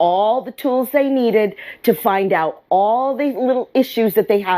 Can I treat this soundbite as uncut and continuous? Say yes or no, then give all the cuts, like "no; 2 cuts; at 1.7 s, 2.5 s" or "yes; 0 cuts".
yes; 0 cuts